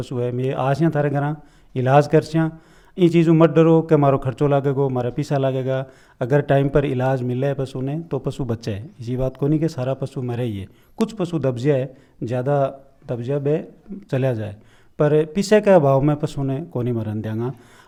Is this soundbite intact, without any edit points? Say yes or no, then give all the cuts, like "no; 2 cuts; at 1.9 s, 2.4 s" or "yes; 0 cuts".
yes; 0 cuts